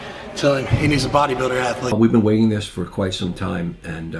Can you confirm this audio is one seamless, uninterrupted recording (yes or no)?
no